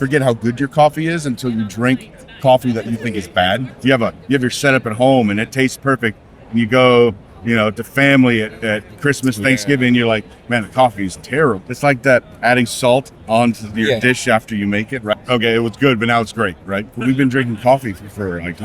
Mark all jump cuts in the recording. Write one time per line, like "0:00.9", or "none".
0:03.7
0:11.7
0:15.1
0:17.0